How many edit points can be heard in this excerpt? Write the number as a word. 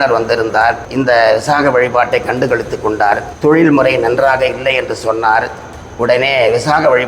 two